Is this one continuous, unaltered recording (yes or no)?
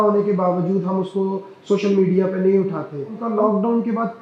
no